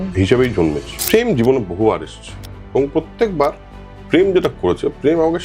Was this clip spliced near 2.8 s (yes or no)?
no